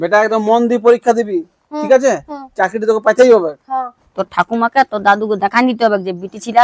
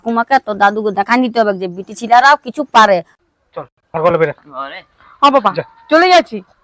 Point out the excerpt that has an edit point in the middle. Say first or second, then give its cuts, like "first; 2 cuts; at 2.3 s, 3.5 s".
second; 1 cut; at 3.1 s